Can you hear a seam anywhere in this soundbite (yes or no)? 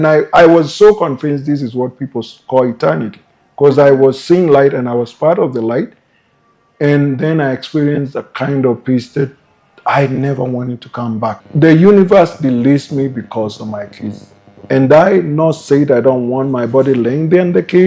yes